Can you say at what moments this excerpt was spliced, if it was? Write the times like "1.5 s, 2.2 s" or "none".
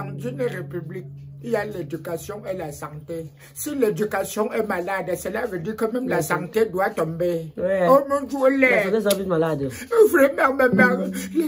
none